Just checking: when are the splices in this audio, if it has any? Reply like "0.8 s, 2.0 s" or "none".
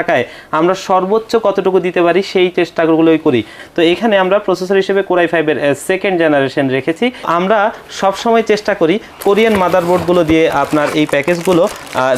3.6 s, 7.3 s